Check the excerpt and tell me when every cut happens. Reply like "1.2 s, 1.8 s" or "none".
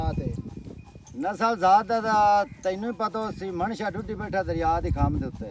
none